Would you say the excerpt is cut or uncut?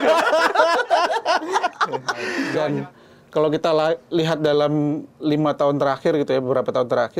cut